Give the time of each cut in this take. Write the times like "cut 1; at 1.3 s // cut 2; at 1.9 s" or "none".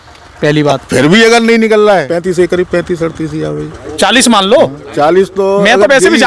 cut 1; at 2.2 s